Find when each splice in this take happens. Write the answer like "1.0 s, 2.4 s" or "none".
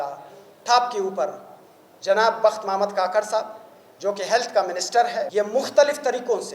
5.3 s